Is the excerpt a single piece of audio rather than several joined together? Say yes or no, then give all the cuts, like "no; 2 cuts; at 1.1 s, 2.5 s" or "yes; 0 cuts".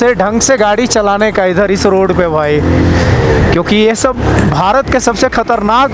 yes; 0 cuts